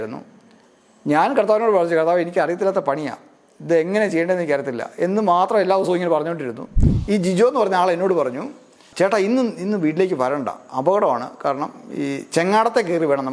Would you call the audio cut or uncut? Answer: cut